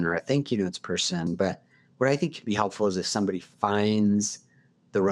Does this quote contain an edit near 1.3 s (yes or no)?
yes